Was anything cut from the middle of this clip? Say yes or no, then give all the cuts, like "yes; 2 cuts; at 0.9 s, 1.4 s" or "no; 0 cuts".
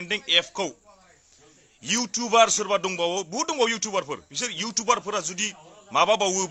no; 0 cuts